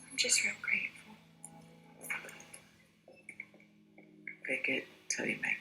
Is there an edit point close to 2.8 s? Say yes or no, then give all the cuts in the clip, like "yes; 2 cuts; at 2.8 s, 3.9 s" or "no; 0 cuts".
yes; 1 cut; at 2.8 s